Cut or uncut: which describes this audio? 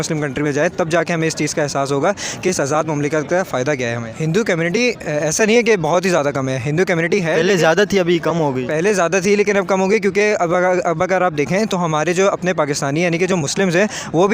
cut